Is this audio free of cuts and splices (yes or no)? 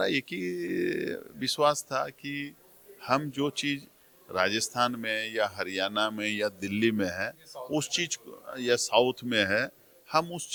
yes